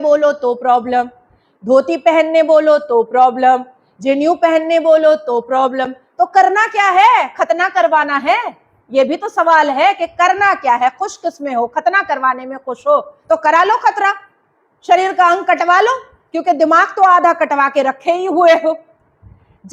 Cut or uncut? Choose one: uncut